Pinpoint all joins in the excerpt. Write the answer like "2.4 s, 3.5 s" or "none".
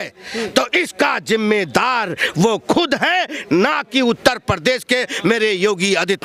none

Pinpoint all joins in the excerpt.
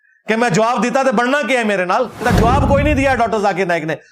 2.2 s

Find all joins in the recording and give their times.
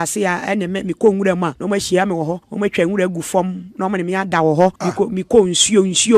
1.6 s, 2.4 s, 4.8 s

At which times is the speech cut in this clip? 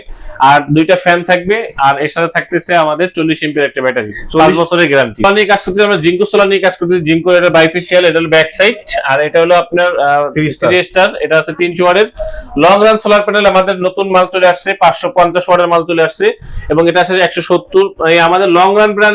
5.2 s

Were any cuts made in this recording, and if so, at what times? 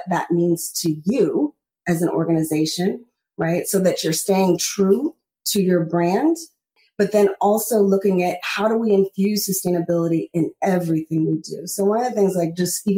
6.8 s

